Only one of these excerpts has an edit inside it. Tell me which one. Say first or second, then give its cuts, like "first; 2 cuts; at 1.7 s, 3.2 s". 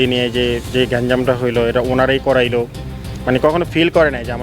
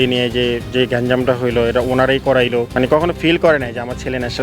second; 1 cut; at 2.7 s